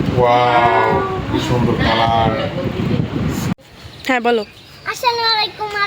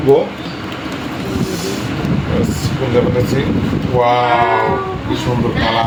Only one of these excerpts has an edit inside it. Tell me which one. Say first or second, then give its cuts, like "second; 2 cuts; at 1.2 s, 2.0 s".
first; 1 cut; at 3.5 s